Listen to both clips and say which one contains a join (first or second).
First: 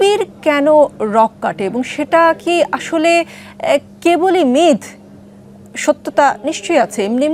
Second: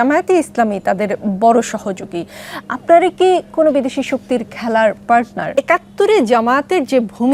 second